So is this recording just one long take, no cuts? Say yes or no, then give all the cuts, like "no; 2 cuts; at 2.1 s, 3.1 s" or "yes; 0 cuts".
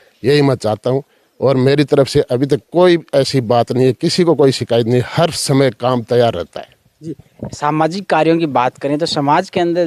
yes; 0 cuts